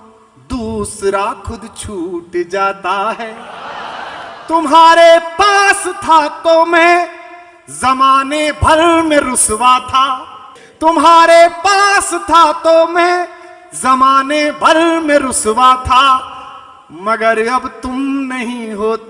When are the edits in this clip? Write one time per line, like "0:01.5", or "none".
none

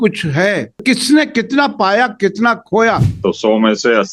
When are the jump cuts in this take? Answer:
0:00.8
0:03.1

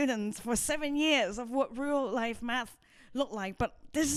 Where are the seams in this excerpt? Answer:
none

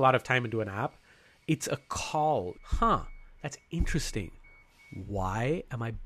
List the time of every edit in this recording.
none

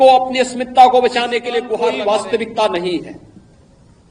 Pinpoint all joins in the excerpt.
0:01.7

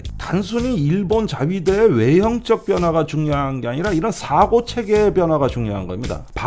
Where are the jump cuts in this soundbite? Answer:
none

